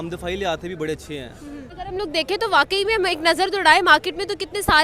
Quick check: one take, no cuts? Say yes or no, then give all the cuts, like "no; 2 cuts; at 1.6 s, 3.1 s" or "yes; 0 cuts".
no; 1 cut; at 1.7 s